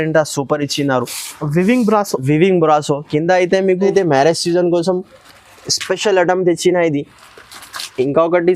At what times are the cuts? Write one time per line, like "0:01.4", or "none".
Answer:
0:03.9